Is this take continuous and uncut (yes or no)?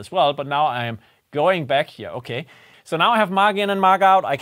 no